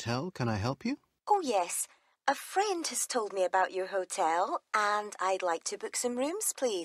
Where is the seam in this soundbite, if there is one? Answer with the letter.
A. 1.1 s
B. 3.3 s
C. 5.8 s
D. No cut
A